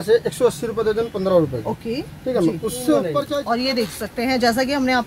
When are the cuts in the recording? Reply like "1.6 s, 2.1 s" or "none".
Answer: 3.3 s